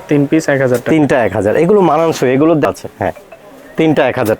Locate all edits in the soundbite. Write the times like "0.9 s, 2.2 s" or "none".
2.7 s